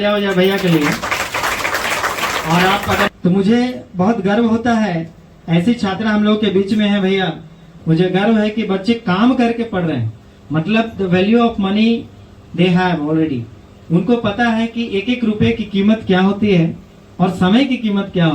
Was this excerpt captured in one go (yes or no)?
no